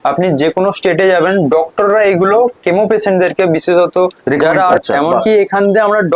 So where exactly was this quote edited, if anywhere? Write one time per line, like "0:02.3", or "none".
0:04.8